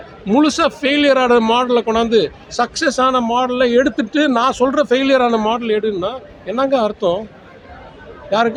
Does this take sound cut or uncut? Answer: uncut